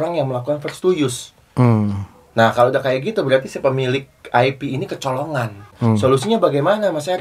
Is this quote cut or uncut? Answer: cut